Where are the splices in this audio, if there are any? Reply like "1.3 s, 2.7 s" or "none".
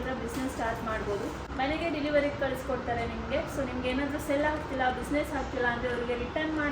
1.4 s